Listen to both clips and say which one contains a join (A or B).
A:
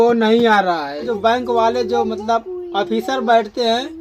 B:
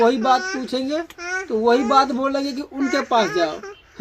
A